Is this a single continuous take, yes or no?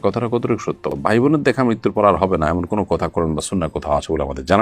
yes